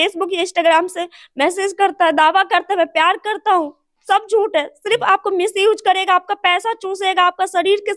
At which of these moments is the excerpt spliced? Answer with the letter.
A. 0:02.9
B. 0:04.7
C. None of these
C